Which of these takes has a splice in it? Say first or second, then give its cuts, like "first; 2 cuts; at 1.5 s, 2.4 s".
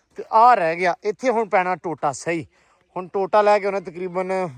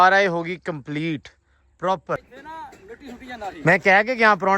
second; 1 cut; at 2.4 s